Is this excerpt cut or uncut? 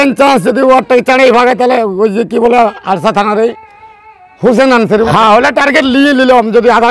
cut